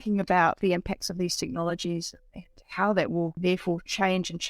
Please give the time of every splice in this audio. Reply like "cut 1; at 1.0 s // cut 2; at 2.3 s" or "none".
cut 1; at 3.3 s